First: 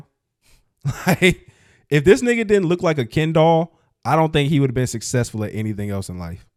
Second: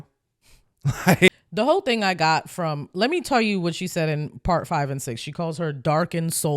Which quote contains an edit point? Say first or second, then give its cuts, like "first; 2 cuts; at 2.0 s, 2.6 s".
second; 1 cut; at 1.3 s